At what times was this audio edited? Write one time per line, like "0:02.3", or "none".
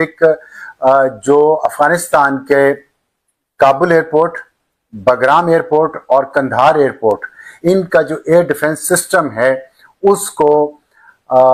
none

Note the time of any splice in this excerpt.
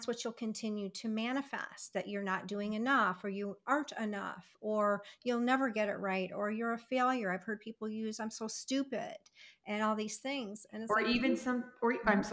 none

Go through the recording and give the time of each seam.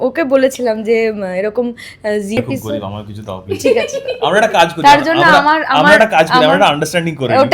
0:02.4

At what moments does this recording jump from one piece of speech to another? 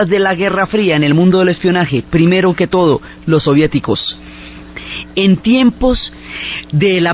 none

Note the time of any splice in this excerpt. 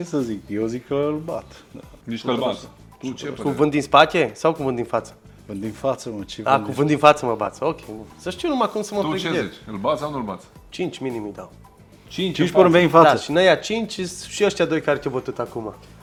none

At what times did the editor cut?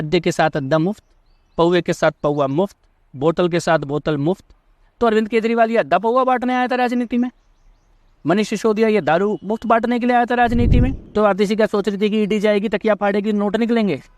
0:11.0

